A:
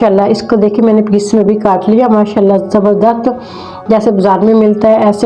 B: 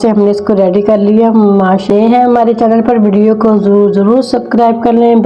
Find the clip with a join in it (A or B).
B